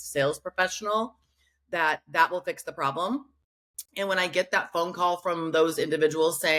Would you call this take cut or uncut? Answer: uncut